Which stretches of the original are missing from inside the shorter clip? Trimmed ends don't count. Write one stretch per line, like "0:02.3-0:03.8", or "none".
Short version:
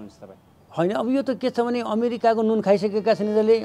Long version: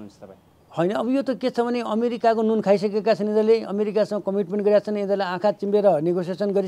none